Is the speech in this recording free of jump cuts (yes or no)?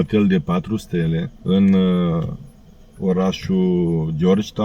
yes